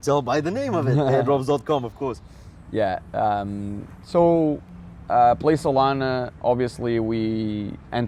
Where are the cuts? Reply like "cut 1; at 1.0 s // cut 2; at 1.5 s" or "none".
none